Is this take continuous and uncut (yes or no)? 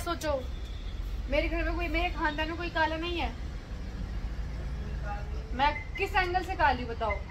yes